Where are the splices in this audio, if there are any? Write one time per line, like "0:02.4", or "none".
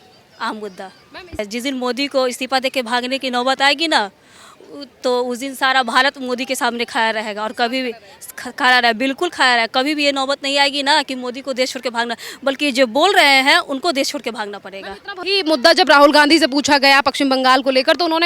0:01.4
0:15.2